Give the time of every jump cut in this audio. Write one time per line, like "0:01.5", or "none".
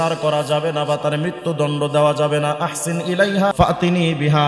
0:03.5